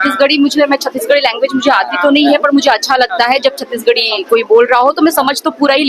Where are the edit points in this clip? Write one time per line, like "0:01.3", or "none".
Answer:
none